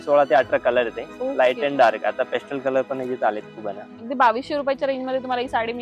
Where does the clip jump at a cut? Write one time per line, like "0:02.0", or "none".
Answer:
0:04.0